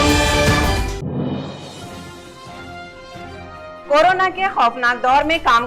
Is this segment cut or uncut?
cut